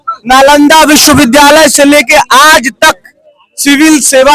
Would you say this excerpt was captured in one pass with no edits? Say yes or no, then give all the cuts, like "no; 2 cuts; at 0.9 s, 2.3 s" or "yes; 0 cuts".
yes; 0 cuts